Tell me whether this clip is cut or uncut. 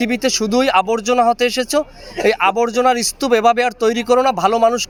uncut